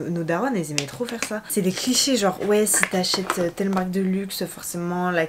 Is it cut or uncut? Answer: uncut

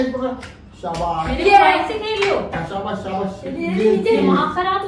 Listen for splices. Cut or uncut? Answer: uncut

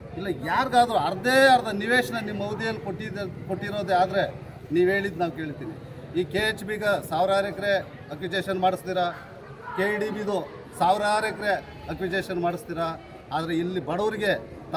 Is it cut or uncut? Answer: uncut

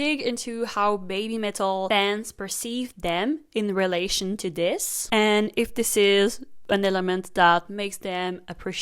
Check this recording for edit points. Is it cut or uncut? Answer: cut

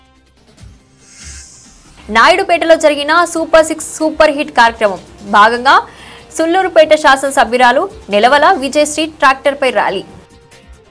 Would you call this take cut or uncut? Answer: uncut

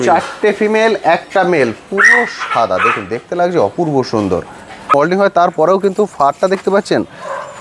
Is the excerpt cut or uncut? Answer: cut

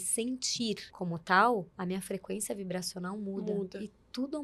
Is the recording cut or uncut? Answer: cut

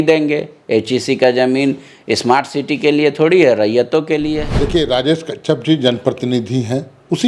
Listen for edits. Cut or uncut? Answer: cut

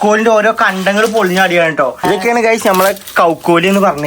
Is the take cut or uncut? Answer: cut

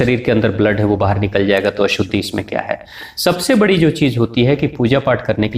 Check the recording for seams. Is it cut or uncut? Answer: uncut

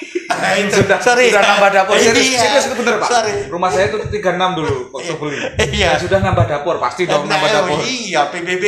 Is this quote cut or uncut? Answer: uncut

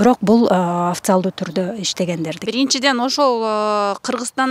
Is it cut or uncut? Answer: cut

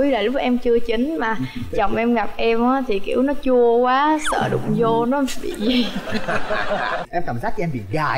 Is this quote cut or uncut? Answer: cut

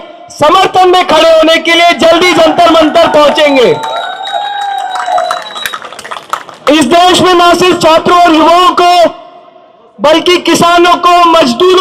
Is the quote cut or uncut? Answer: uncut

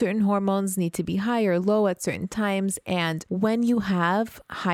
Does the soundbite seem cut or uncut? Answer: cut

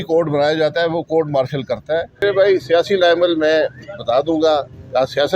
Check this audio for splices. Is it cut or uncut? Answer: cut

